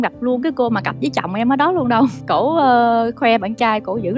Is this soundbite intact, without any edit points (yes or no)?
no